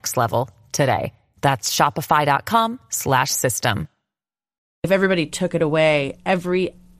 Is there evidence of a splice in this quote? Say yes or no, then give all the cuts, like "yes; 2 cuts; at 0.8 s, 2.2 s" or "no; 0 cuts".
yes; 1 cut; at 4.9 s